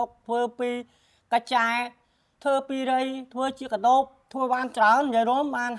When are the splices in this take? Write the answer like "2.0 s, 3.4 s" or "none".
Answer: none

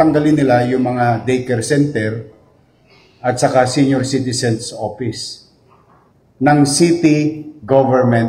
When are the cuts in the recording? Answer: 6.4 s

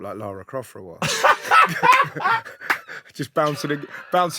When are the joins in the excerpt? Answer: none

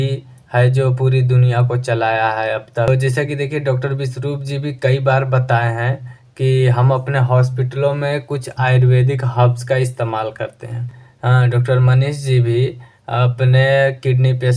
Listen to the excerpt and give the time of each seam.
2.9 s, 11.2 s

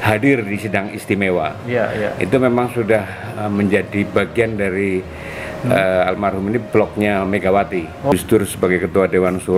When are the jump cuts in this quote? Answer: 8.1 s

